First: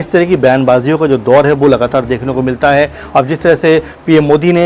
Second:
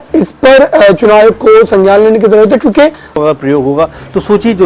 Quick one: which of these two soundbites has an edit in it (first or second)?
second